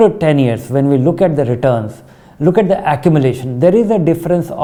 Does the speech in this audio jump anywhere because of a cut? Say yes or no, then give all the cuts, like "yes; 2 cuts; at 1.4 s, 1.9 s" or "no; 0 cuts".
no; 0 cuts